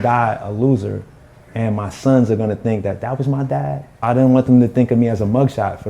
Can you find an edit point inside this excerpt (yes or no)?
yes